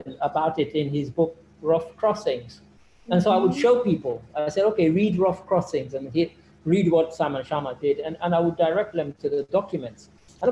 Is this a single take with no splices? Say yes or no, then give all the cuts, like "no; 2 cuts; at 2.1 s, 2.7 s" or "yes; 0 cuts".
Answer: yes; 0 cuts